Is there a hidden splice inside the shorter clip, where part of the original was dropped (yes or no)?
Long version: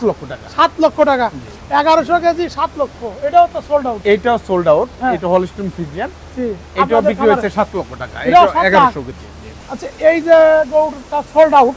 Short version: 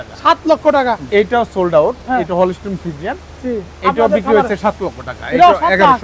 yes